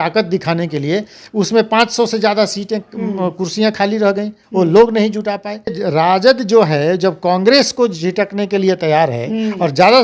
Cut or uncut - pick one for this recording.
cut